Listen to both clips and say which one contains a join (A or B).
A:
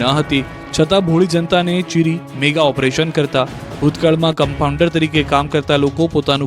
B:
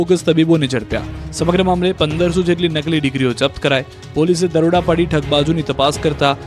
A